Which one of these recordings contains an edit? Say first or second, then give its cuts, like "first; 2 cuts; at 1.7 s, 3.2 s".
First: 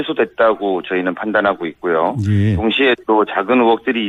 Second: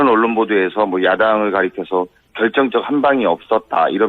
second; 1 cut; at 1.5 s